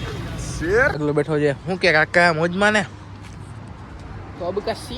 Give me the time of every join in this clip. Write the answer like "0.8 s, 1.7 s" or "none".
1.0 s